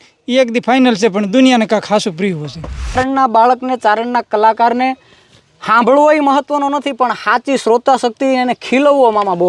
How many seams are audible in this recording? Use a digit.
1